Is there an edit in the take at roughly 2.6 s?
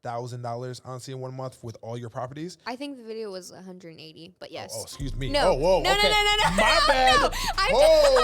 yes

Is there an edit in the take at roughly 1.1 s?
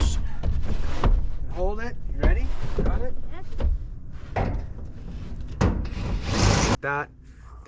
no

